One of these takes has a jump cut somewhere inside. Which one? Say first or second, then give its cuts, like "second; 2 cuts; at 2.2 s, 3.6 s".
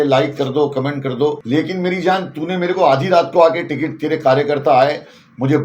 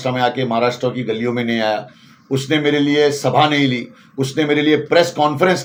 first; 1 cut; at 1.4 s